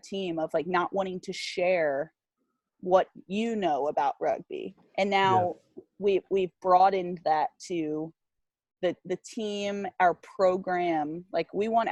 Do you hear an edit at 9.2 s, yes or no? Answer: no